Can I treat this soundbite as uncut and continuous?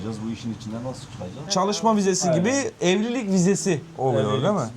no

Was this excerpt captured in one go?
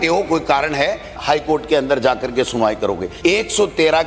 no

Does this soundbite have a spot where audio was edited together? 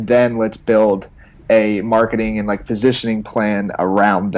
no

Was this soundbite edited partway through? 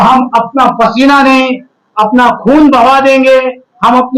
no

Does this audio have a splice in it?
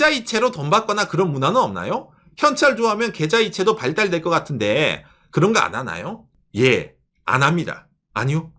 no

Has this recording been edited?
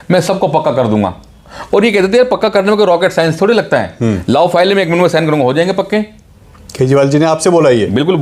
no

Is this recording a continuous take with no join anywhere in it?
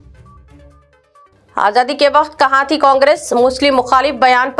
no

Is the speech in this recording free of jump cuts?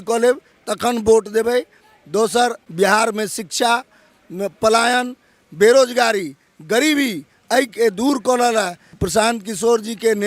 no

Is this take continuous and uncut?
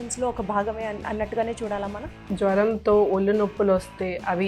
no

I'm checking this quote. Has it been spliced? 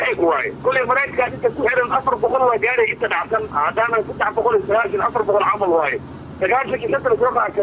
yes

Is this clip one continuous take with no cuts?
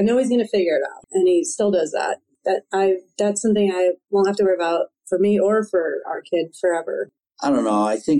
no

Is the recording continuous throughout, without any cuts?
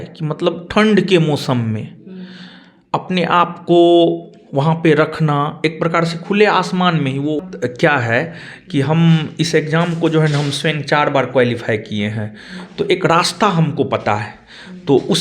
no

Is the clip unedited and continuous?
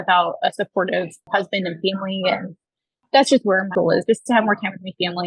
no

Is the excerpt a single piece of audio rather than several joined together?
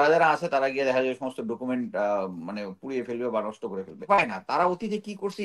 no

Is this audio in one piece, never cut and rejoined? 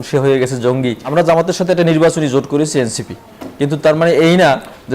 no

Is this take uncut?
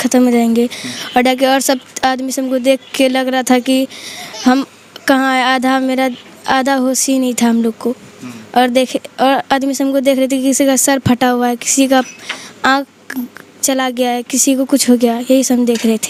yes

